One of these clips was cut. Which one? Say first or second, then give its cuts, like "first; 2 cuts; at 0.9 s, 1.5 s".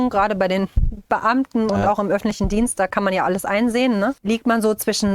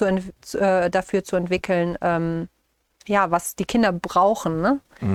first; 1 cut; at 4.2 s